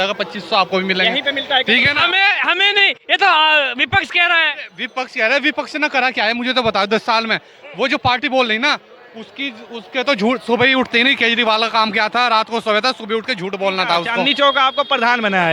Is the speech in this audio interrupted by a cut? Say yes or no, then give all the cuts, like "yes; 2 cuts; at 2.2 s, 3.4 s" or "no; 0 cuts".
yes; 1 cut; at 14.2 s